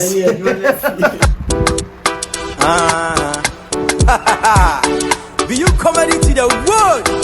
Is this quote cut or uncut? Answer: cut